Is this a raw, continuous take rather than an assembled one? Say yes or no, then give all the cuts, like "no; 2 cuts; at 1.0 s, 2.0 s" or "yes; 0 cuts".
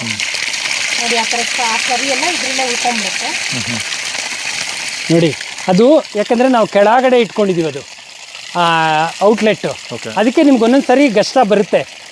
yes; 0 cuts